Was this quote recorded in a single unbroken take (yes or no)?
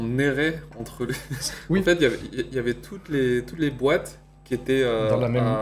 yes